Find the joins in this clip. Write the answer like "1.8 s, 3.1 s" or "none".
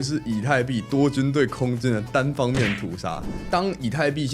3.4 s